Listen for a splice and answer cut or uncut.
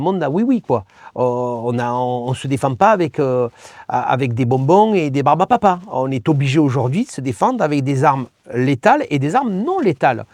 uncut